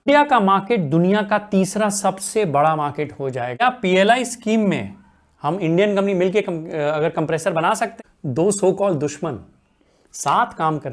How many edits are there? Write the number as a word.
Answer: two